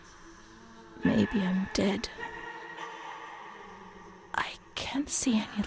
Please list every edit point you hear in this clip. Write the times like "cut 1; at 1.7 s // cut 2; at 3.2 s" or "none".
cut 1; at 2.1 s // cut 2; at 4.3 s